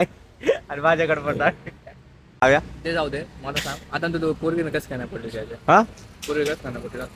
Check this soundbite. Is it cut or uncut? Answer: cut